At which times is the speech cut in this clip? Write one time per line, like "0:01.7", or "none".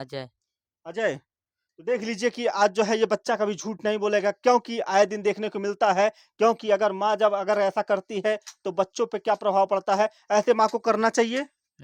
none